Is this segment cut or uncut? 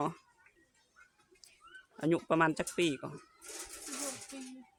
uncut